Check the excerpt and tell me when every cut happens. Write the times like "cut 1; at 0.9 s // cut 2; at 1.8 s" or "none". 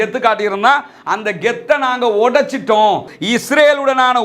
cut 1; at 3.1 s

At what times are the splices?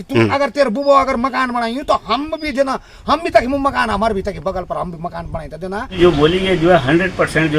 cut 1; at 5.9 s

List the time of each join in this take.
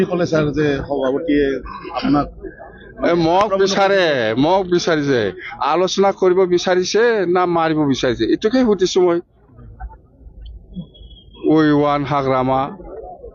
none

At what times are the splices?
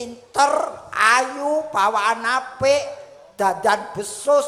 none

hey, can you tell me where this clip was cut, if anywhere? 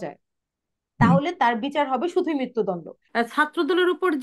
cut 1; at 3.0 s

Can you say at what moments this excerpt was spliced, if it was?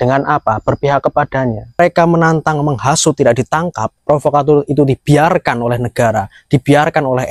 cut 1; at 1.8 s

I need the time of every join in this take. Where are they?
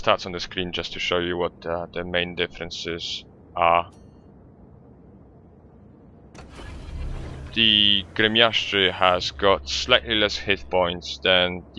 none

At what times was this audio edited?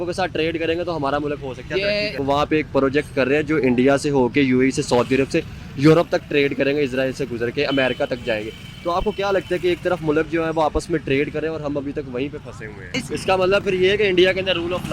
cut 1; at 2.2 s // cut 2; at 12.9 s

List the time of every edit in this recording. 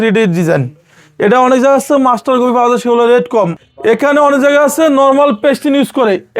cut 1; at 3.6 s

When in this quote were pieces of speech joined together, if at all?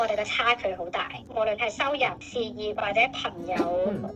none

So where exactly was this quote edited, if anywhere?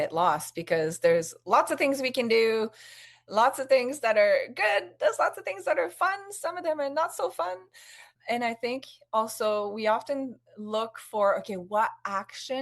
cut 1; at 8.1 s

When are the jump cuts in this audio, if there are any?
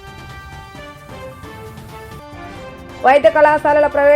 cut 1; at 2.2 s

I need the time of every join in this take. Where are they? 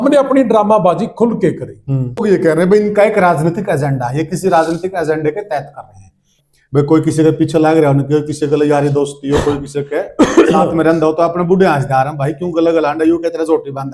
cut 1; at 2.2 s // cut 2; at 6.3 s

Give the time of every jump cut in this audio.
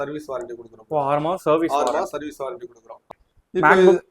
cut 1; at 3.1 s

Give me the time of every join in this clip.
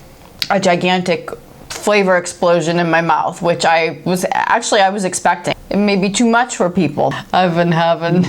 cut 1; at 5.5 s // cut 2; at 7.1 s

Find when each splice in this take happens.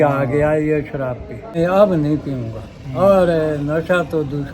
cut 1; at 1.6 s

